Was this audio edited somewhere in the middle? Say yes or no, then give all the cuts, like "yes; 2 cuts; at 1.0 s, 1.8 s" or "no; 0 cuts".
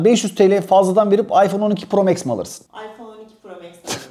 no; 0 cuts